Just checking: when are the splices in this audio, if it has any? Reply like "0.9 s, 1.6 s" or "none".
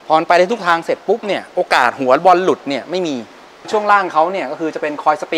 3.7 s